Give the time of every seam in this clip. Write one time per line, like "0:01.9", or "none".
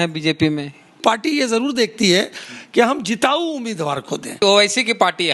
0:01.0
0:04.4